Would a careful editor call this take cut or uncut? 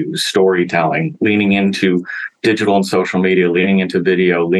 uncut